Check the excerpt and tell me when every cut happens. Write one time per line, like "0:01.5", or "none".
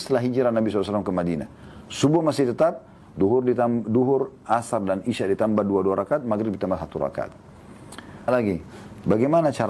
0:08.3